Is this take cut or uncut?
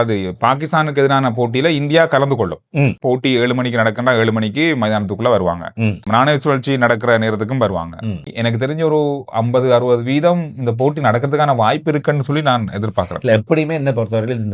cut